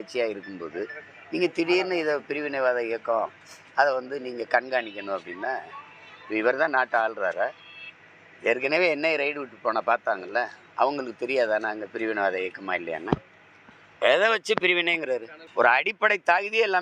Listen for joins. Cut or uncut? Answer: cut